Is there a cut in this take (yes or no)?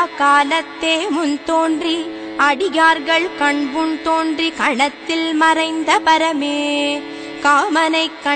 no